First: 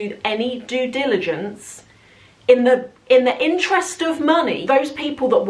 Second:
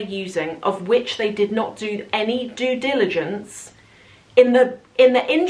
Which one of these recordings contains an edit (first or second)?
first